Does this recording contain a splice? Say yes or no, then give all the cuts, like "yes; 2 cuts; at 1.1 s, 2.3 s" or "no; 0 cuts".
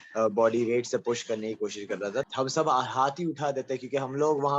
yes; 1 cut; at 2.3 s